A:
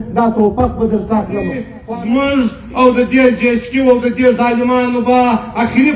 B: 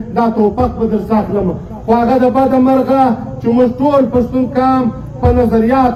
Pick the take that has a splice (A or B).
A